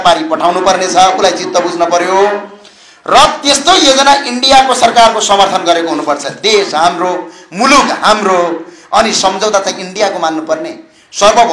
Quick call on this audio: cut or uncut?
uncut